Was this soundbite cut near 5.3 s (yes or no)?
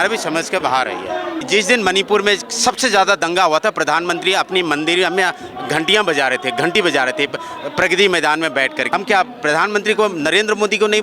no